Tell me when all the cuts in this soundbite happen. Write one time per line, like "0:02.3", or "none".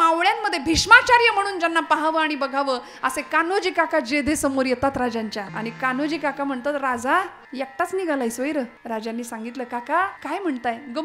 0:05.5
0:07.4
0:08.8
0:10.2